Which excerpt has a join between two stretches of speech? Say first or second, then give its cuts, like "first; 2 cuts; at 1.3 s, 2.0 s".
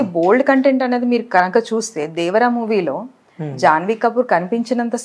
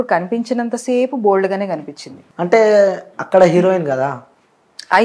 second; 1 cut; at 2.3 s